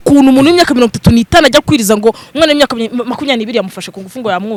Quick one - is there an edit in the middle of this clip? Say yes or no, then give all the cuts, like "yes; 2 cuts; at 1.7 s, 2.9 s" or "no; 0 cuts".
no; 0 cuts